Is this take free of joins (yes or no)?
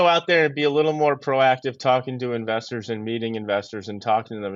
yes